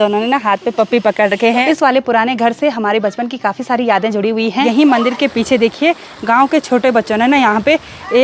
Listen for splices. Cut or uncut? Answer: cut